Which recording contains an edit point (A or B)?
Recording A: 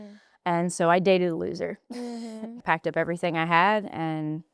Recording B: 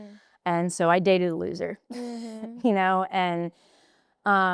A